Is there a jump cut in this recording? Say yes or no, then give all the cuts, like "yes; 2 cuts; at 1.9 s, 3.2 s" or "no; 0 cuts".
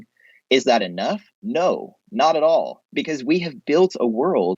no; 0 cuts